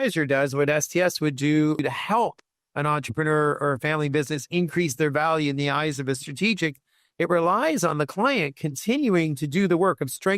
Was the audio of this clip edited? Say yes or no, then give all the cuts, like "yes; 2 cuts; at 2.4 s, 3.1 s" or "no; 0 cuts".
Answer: yes; 1 cut; at 1.8 s